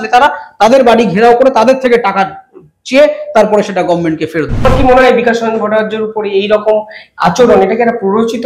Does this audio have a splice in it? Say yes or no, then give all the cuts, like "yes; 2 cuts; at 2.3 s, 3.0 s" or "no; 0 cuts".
yes; 1 cut; at 4.7 s